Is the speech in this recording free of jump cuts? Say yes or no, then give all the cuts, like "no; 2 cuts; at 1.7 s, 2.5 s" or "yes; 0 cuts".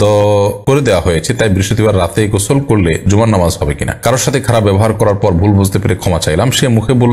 no; 1 cut; at 3.9 s